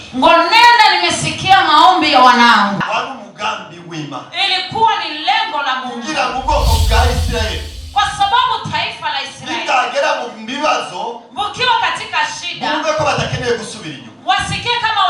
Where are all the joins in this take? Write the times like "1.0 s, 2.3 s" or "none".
2.8 s